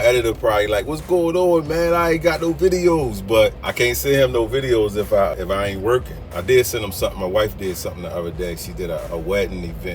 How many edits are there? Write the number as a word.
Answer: three